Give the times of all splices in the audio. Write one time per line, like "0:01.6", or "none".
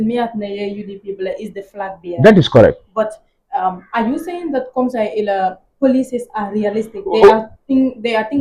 none